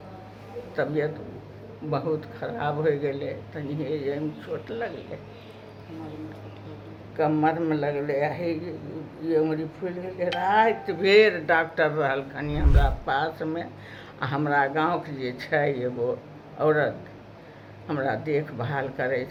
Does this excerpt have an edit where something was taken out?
no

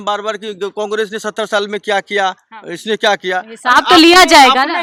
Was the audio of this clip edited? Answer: no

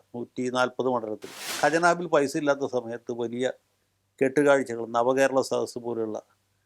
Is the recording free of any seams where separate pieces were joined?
no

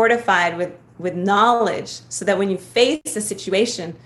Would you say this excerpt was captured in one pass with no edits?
no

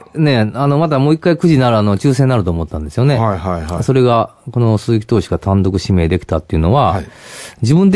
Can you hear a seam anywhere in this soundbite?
no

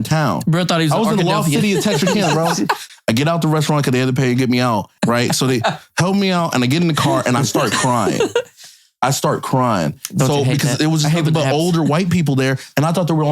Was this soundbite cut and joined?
yes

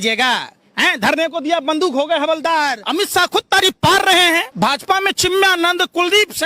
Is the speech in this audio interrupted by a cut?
yes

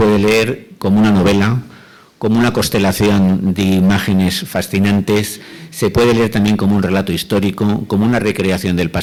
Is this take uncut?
yes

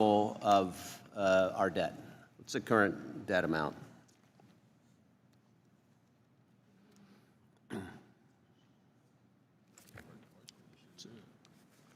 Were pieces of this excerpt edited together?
no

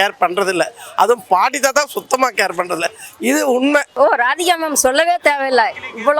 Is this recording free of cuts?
no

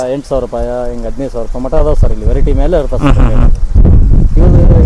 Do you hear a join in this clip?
no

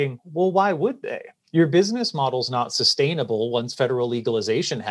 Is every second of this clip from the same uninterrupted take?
yes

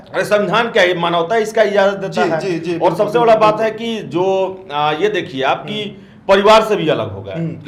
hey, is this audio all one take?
yes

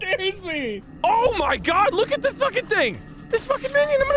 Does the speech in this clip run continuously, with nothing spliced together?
no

